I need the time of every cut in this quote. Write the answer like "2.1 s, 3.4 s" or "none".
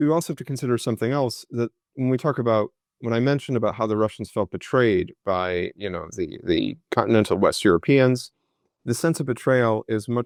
none